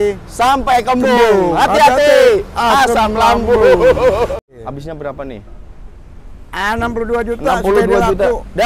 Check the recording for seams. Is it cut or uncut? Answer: cut